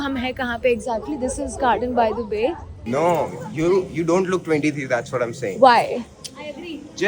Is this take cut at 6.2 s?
no; 1 cut; at 2.8 s

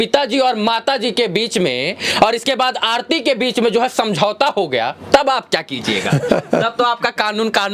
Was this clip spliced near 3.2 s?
no; 0 cuts

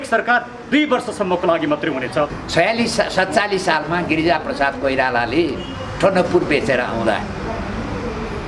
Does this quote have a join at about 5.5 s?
no; 1 cut; at 2.4 s

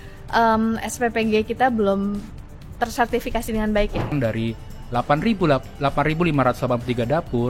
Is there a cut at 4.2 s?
yes; 1 cut; at 4.2 s

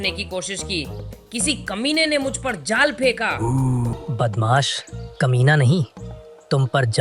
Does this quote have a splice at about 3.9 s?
yes; 1 cut; at 3.9 s

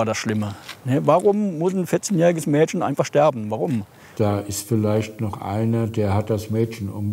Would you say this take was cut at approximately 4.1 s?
yes; 1 cut; at 4.1 s

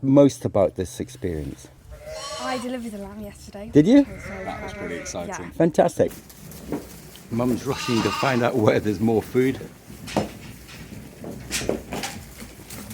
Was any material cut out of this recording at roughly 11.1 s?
yes; 2 cuts; at 6.1 s, 11.1 s

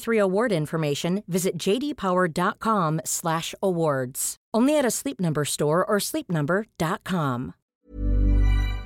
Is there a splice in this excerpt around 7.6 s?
yes; 1 cut; at 7.6 s

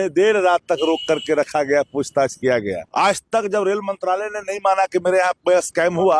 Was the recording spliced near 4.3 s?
no; 1 cut; at 2.8 s

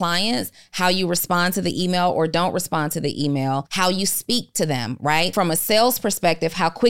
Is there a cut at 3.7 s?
yes; 2 cuts; at 3.7 s, 5.3 s

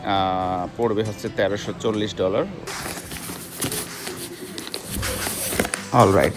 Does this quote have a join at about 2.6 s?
yes; 1 cut; at 2.6 s

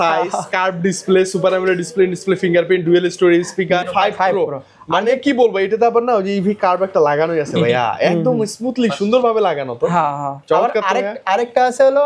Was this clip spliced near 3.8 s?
yes; 1 cut; at 3.8 s

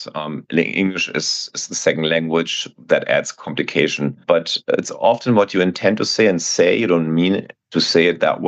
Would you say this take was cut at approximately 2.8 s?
no; 1 cut; at 4.2 s

